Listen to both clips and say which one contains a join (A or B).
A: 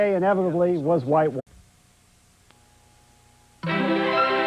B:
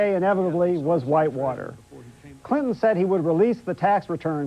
B